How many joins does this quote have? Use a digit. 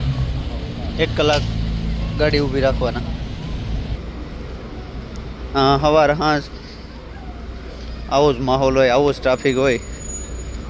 1